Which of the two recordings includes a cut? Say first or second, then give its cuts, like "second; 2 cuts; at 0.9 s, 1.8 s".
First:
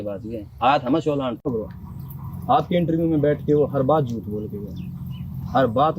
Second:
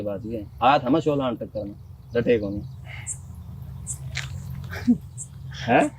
first; 1 cut; at 1.5 s